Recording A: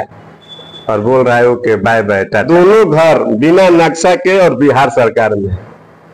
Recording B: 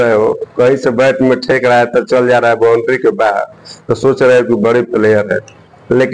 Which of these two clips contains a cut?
A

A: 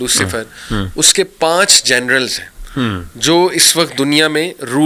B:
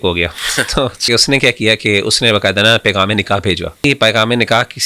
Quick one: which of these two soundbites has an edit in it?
B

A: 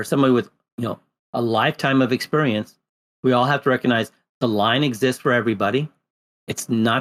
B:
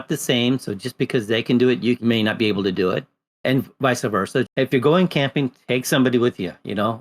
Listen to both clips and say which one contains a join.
B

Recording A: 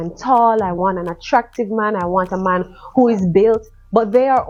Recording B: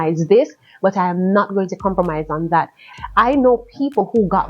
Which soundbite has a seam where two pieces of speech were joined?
B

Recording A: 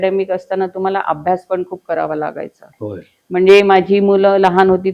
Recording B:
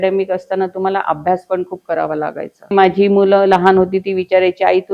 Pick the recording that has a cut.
B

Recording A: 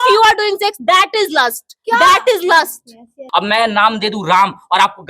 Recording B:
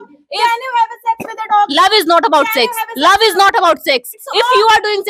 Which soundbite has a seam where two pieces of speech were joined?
A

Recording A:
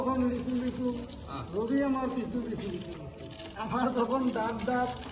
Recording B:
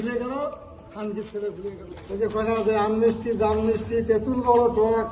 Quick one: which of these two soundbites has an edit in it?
B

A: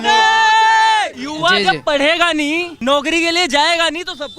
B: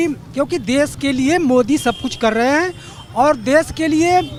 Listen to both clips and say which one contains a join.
A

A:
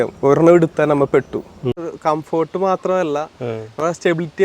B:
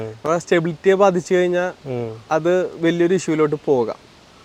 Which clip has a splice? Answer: A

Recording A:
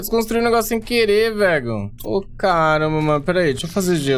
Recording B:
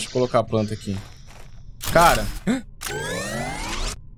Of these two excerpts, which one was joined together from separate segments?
A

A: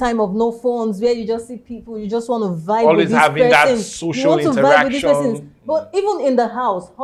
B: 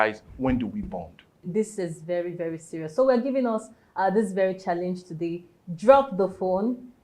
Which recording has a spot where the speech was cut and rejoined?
B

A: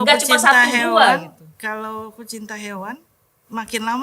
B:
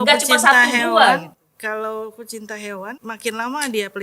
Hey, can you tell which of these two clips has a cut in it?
B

